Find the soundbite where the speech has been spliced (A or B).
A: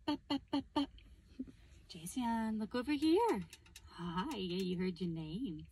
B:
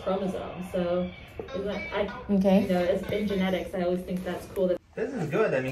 B